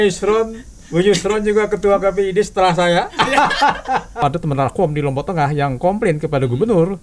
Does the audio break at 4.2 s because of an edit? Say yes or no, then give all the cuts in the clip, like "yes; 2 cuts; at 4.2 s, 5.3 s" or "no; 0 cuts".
yes; 1 cut; at 4.2 s